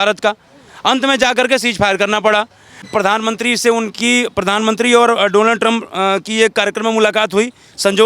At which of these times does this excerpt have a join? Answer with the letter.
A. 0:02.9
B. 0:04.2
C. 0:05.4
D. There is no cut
A